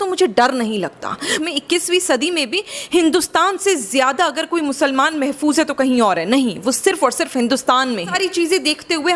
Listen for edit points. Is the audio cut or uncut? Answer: cut